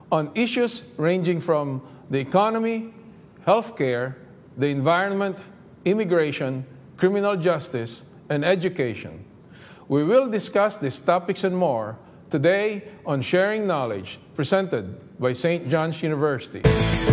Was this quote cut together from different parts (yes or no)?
yes